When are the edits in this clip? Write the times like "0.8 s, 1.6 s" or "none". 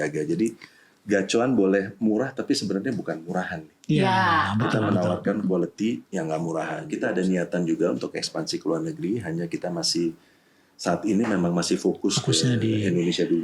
6.8 s